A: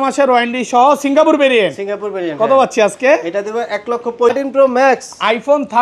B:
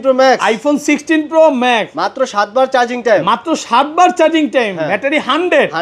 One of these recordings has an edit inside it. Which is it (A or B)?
A